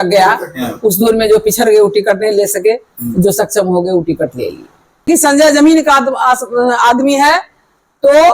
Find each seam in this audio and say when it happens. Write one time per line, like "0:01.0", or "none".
0:05.1